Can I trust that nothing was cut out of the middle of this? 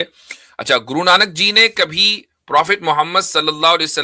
yes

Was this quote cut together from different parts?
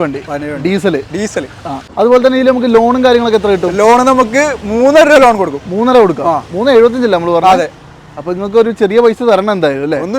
yes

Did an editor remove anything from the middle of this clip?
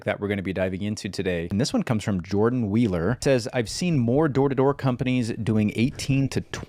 yes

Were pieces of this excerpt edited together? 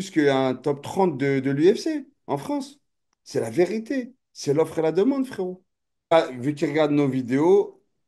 yes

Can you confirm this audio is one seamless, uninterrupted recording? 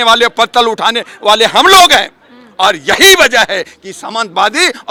yes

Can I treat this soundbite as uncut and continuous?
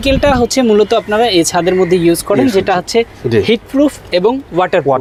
yes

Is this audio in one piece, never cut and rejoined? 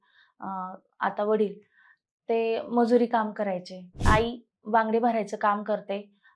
no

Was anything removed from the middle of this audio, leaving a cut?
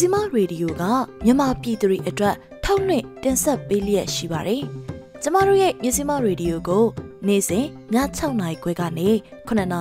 no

